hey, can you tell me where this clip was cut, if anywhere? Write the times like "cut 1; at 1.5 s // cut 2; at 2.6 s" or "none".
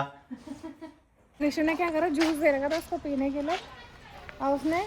cut 1; at 1.3 s